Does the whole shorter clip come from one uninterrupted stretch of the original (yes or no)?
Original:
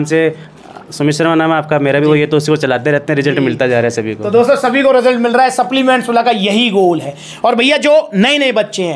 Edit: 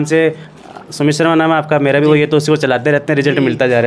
yes